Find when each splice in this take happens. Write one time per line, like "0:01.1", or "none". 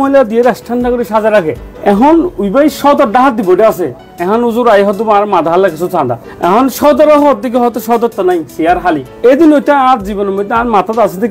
0:01.7
0:09.1